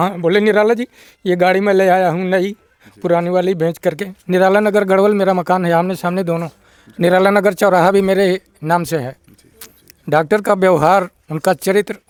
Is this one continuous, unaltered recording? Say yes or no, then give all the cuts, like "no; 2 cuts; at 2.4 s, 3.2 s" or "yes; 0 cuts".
yes; 0 cuts